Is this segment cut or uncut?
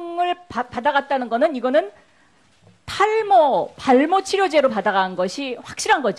uncut